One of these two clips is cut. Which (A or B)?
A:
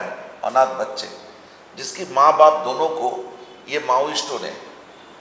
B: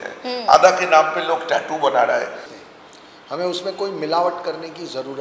B